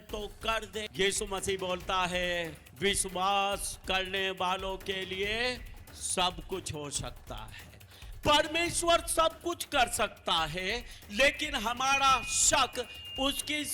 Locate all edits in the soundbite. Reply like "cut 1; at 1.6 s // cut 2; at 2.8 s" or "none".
cut 1; at 0.9 s // cut 2; at 2.6 s